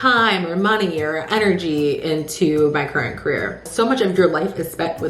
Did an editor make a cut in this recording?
yes; 1 cut; at 3.6 s

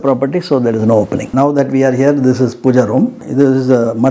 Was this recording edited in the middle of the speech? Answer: yes; 2 cuts; at 1.3 s, 3.2 s

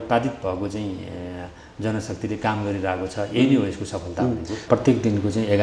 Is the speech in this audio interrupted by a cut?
yes; 1 cut; at 4.6 s

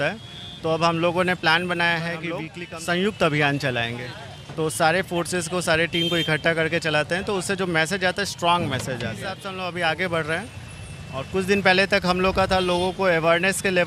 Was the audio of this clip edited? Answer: yes; 2 cuts; at 2.6 s, 9.5 s

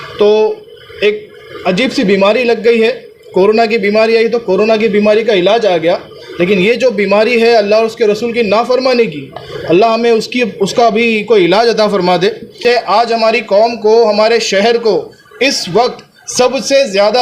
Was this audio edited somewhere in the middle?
yes; 1 cut; at 12.6 s

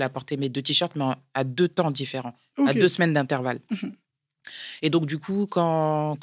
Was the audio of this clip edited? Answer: no; 0 cuts

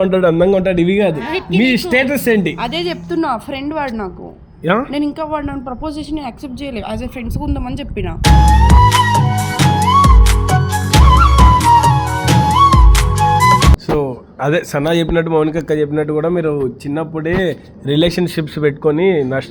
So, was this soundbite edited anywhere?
yes; 1 cut; at 13.8 s

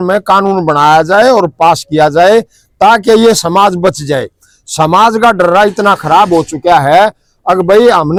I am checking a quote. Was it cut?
no; 0 cuts

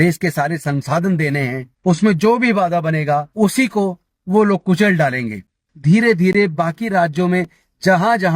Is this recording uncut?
no; 3 cuts; at 1.7 s, 3.3 s, 5.7 s

